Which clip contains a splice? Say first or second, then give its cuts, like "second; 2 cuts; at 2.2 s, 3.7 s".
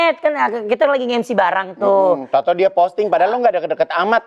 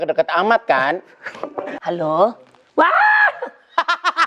second; 1 cut; at 1.6 s